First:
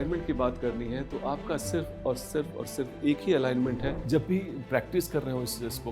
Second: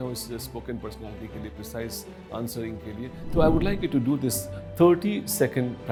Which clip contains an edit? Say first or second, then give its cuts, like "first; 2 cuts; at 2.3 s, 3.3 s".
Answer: first; 1 cut; at 4.0 s